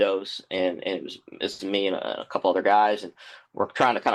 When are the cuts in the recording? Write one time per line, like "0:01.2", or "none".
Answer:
none